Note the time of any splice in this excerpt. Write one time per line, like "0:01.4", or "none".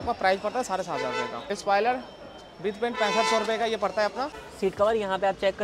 0:01.4
0:04.4